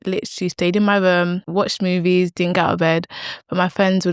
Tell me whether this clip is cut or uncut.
cut